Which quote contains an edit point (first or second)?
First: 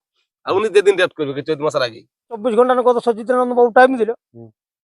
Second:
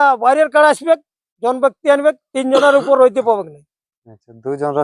first